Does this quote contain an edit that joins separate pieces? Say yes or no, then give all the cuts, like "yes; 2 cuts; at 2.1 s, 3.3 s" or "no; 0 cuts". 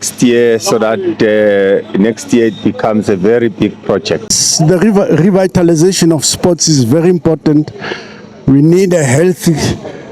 yes; 1 cut; at 4.4 s